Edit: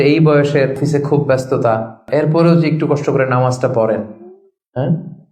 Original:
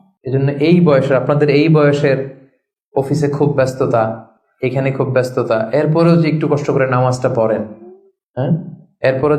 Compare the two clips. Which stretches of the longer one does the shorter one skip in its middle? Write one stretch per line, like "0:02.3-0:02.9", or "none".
0:02.3-0:03.1
0:04.3-0:05.7